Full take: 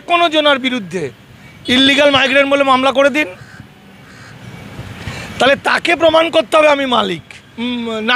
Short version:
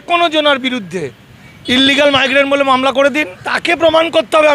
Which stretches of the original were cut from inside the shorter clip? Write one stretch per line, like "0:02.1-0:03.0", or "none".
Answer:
0:03.5-0:05.7